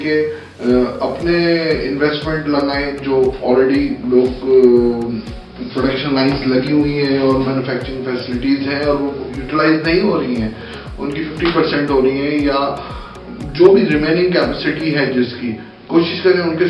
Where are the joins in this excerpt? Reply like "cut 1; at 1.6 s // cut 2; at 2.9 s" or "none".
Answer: none